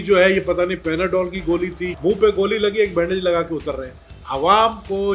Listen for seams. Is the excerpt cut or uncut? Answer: cut